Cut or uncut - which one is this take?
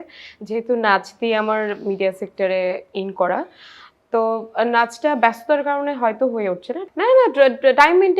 cut